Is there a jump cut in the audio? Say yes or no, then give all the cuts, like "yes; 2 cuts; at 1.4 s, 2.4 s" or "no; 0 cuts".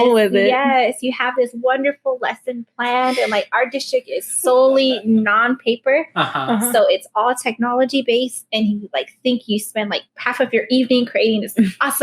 yes; 1 cut; at 10.0 s